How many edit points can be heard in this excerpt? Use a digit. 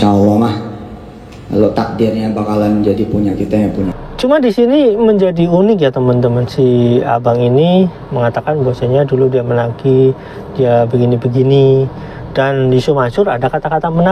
1